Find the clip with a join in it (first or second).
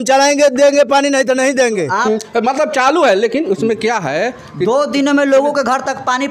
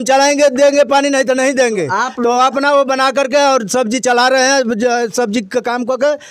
first